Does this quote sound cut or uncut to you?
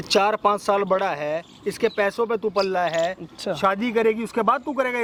uncut